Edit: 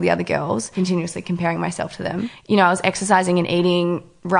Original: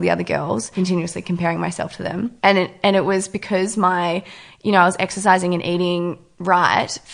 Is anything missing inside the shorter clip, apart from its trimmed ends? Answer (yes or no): yes